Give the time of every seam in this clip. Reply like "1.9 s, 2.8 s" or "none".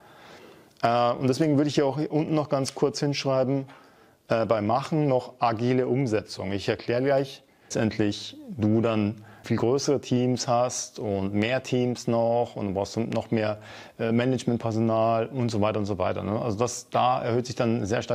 7.7 s